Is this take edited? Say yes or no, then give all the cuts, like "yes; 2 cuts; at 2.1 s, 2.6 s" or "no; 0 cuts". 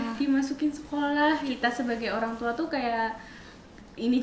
yes; 1 cut; at 1.5 s